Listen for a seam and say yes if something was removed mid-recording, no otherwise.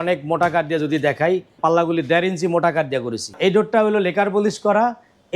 yes